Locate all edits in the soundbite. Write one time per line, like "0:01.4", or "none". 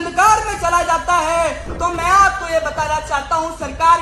0:01.7